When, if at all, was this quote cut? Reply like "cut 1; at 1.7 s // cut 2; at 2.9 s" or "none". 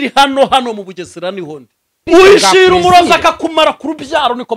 cut 1; at 2.0 s